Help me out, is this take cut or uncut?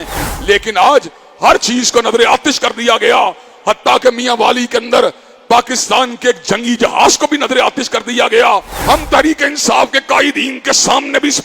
cut